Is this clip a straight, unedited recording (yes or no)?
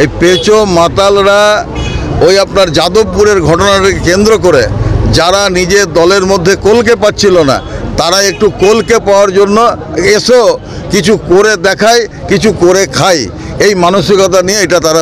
yes